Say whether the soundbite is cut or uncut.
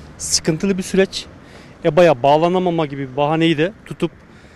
uncut